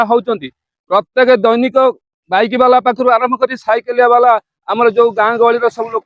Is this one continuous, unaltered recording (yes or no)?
yes